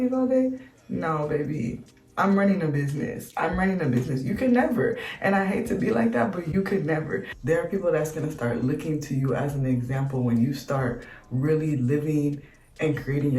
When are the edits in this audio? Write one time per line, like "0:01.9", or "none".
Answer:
0:07.3